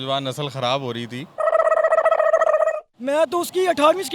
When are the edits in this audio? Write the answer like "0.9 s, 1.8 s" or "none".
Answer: 1.2 s, 2.9 s